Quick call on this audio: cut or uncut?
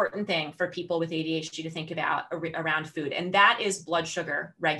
uncut